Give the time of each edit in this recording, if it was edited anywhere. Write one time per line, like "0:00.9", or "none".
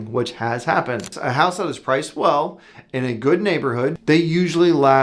0:01.2
0:04.0